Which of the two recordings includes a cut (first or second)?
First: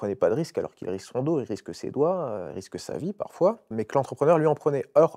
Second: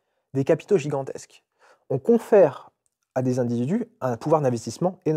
first